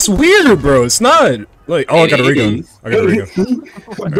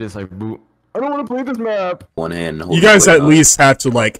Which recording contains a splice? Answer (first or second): second